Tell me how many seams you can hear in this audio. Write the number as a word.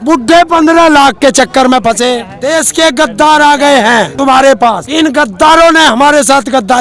three